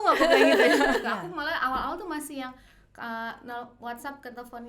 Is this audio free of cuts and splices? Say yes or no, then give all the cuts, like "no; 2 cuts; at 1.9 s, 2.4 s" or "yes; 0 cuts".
no; 1 cut; at 1.0 s